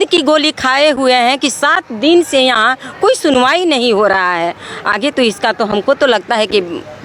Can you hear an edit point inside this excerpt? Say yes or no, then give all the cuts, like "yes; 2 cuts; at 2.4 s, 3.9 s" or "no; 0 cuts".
no; 0 cuts